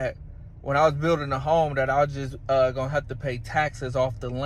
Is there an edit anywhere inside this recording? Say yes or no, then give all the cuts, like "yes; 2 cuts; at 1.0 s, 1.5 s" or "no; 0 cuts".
no; 0 cuts